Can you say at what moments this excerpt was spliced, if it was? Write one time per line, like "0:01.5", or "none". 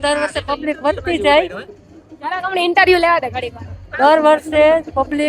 none